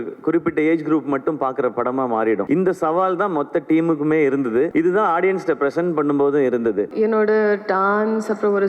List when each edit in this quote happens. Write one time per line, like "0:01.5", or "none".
0:02.4
0:04.7
0:06.9